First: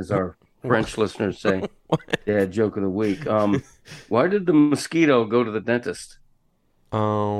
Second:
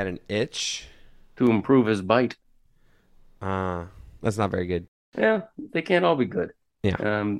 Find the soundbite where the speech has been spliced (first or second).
second